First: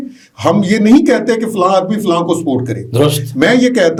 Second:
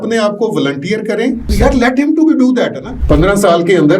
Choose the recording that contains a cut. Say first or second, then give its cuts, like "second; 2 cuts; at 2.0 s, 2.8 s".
second; 2 cuts; at 1.5 s, 2.9 s